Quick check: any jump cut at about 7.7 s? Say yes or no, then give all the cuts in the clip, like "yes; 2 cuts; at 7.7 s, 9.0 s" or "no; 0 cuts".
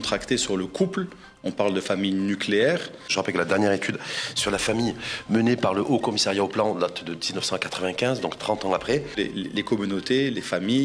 no; 2 cuts; at 3.1 s, 9.2 s